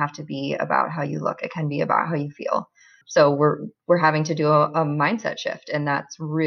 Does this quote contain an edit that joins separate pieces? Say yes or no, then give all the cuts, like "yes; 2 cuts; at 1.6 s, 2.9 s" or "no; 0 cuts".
no; 0 cuts